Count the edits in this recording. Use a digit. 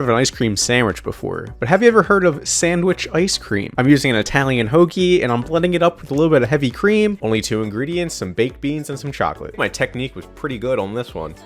3